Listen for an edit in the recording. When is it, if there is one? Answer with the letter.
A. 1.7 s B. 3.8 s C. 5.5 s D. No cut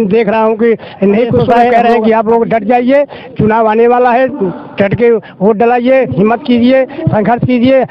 A